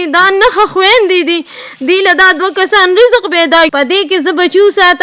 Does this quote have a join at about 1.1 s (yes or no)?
no